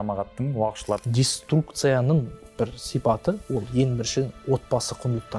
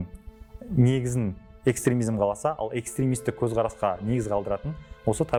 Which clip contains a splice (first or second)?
first